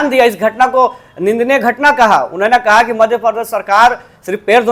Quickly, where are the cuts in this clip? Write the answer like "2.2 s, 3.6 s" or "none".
none